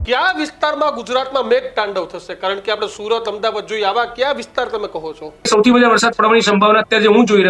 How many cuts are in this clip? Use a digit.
1